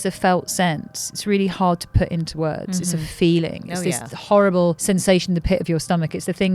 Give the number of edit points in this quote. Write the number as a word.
one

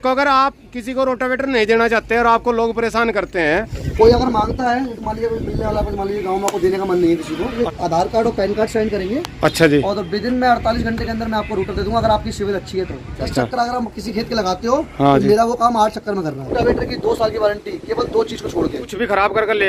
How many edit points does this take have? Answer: five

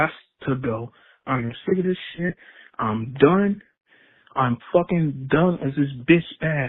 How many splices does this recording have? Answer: zero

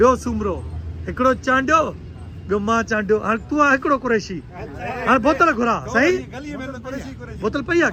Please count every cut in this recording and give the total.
zero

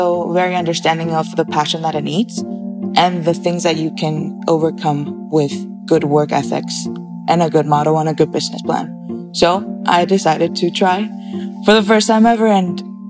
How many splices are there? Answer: zero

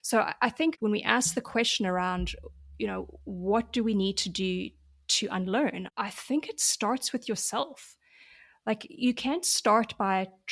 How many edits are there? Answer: two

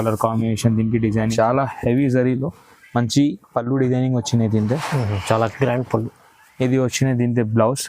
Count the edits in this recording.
one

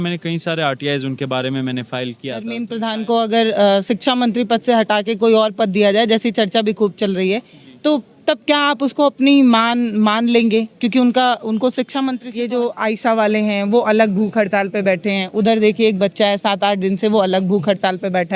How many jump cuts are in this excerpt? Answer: two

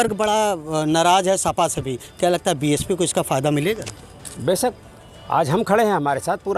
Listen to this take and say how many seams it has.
zero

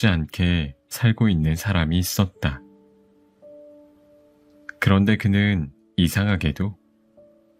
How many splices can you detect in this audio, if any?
two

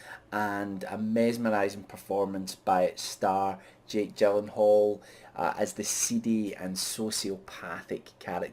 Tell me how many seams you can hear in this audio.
one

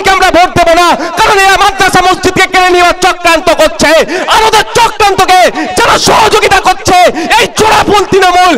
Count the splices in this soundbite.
zero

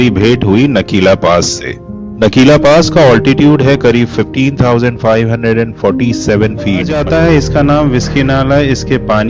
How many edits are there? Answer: one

